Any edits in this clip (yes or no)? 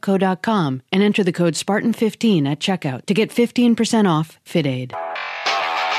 yes